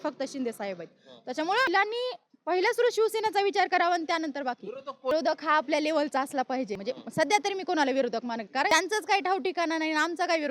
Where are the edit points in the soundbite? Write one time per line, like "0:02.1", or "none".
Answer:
0:01.7
0:05.1
0:06.8
0:08.7